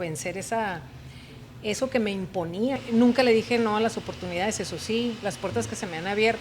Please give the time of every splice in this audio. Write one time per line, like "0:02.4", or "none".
0:02.8